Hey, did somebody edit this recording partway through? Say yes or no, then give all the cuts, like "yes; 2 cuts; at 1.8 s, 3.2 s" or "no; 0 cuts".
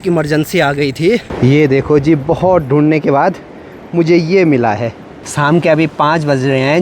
yes; 2 cuts; at 1.3 s, 5.3 s